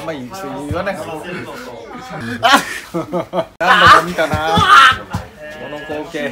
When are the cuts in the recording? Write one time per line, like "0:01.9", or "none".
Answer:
0:02.2
0:03.6